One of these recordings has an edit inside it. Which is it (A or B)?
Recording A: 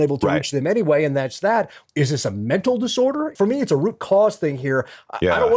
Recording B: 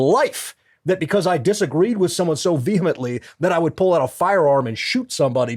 A